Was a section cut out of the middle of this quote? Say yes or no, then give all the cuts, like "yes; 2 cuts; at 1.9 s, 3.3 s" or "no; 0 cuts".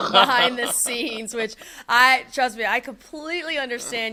no; 0 cuts